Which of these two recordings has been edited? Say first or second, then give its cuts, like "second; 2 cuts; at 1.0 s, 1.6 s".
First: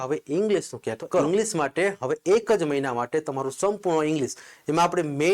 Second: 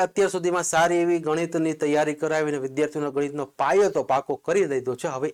first; 1 cut; at 1.2 s